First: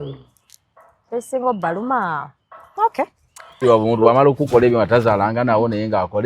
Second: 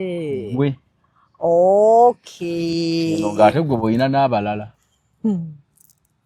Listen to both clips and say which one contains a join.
first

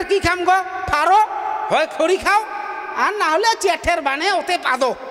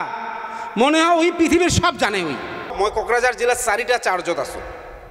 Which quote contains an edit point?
second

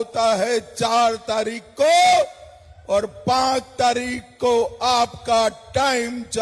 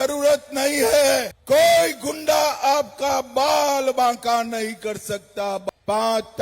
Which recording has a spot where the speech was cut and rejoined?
second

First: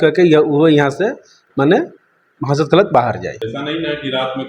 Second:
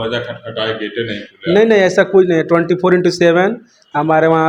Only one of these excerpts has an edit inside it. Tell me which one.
first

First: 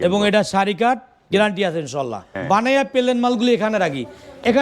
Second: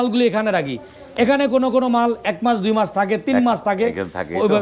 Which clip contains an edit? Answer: first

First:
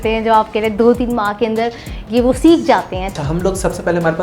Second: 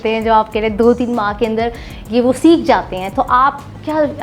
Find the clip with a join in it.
first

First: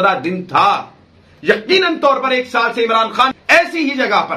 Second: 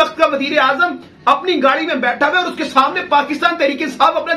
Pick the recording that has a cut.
first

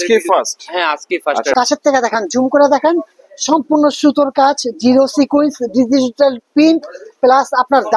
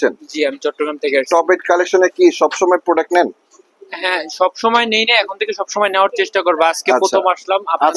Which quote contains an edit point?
first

